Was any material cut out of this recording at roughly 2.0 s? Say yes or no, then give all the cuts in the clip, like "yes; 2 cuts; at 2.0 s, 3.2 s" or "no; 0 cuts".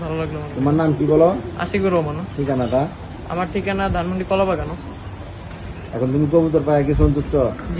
no; 0 cuts